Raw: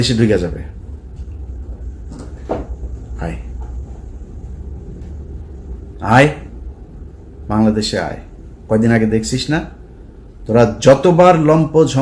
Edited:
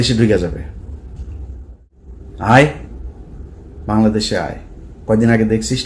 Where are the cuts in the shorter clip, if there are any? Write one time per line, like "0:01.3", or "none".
0:02.0